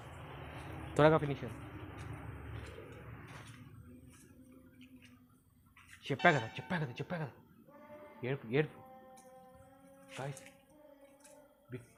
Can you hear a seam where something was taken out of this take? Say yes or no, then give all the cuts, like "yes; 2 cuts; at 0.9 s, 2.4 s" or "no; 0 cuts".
no; 0 cuts